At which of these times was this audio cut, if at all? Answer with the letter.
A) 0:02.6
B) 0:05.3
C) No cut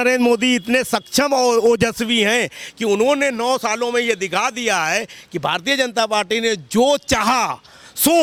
C